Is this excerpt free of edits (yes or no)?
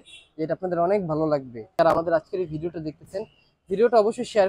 no